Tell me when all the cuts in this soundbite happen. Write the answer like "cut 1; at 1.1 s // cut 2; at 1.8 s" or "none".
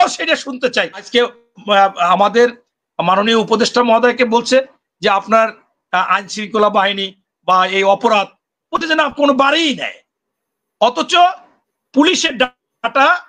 cut 1; at 1.0 s